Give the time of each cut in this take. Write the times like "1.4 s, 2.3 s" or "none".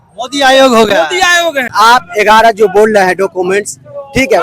1.7 s